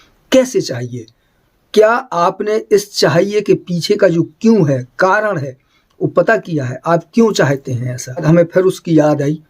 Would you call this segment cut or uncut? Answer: cut